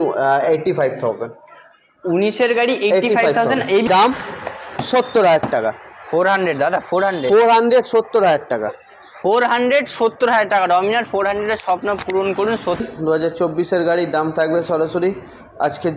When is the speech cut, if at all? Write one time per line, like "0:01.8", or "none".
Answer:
0:03.9
0:12.8